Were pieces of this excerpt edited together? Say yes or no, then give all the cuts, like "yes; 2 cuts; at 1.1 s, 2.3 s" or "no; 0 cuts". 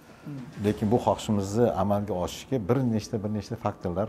no; 0 cuts